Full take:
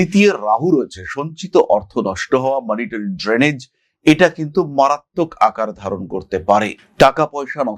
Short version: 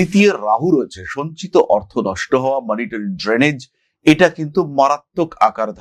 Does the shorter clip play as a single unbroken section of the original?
yes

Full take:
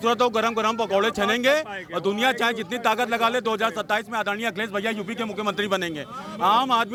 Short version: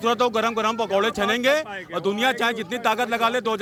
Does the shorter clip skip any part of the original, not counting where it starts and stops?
no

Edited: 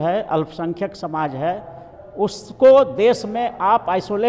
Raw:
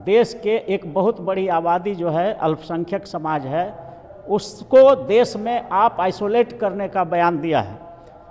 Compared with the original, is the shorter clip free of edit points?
yes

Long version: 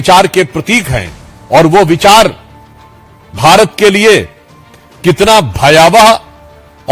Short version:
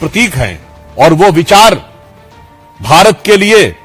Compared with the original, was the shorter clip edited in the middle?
no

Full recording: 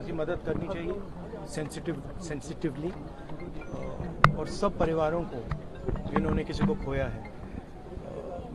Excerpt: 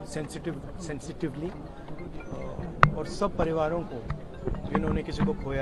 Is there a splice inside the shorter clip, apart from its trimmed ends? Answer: no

